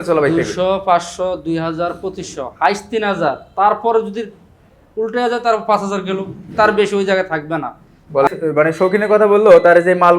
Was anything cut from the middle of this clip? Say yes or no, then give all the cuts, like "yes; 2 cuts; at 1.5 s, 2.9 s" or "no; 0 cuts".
yes; 1 cut; at 8.3 s